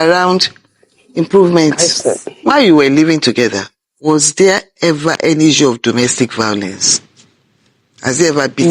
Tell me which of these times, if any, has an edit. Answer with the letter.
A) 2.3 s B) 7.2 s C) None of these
A